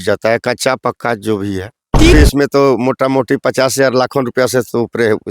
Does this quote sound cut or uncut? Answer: cut